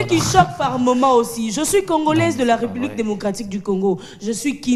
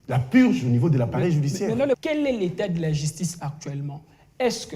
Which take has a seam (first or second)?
second